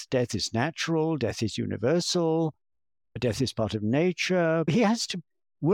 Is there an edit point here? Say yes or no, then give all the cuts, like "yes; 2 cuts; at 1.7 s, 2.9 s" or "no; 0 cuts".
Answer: yes; 1 cut; at 4.7 s